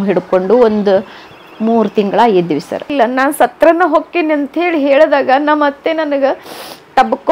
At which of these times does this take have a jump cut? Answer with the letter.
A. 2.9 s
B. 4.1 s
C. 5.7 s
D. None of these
A